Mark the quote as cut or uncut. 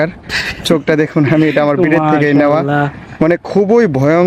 uncut